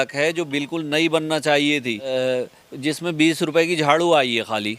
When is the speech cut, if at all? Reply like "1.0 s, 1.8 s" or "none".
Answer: 2.1 s